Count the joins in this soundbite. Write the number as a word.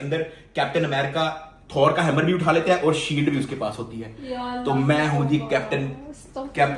zero